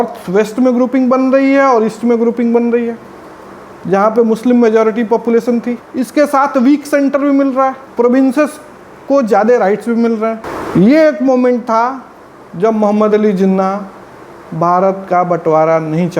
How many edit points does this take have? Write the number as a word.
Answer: three